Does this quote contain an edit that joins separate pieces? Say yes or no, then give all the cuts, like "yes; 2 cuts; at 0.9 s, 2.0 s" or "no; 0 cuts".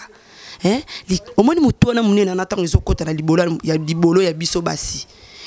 yes; 1 cut; at 1.3 s